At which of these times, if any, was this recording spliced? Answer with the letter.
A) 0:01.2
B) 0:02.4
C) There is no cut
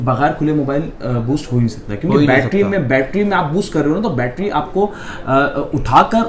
C